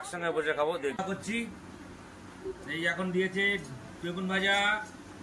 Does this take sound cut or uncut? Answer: cut